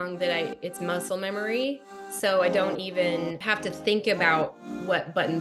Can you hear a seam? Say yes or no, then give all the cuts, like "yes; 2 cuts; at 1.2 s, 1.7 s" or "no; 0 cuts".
yes; 1 cut; at 3.4 s